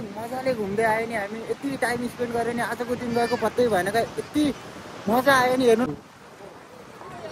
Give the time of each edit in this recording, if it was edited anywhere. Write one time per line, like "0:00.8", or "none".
0:05.9